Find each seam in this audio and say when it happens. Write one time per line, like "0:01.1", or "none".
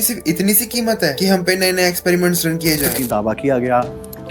0:02.9

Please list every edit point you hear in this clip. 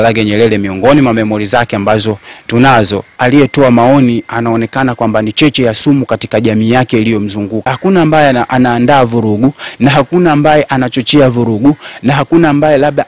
0:03.1
0:07.7

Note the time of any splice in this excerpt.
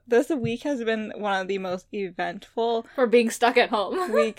none

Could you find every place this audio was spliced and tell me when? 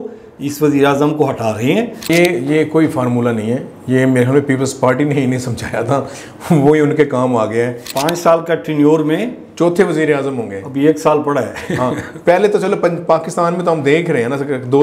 0:02.1
0:07.9

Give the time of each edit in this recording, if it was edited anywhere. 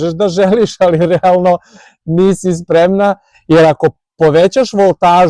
none

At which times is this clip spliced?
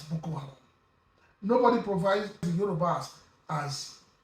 0:02.4

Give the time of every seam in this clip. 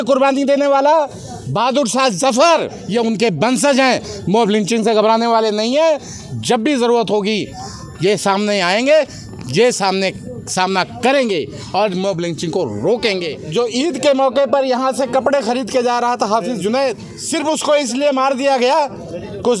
0:02.8
0:13.4
0:17.1

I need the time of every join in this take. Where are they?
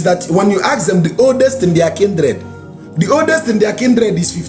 none

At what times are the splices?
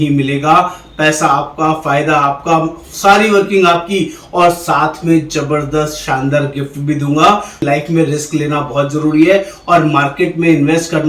0:07.6

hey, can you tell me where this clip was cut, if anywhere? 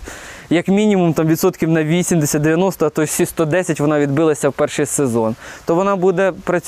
none

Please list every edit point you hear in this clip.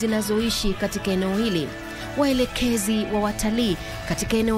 0:01.7

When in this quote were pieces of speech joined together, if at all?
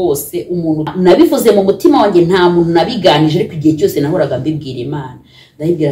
0:00.9

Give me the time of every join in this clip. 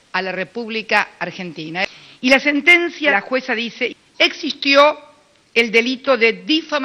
0:01.8
0:03.1

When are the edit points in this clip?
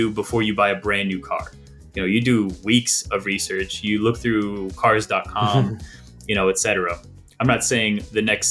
none

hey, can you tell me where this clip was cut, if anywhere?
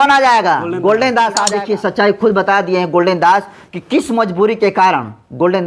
0:01.6

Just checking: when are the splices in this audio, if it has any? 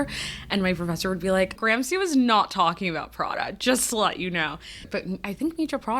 0:01.6
0:04.9

